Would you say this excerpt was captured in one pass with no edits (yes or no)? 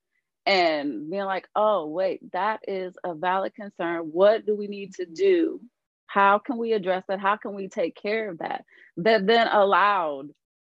yes